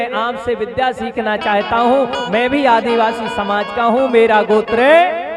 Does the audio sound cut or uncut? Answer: uncut